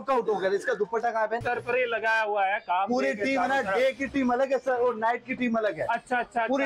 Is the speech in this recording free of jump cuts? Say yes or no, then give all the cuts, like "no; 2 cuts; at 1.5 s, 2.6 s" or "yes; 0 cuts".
no; 1 cut; at 1.4 s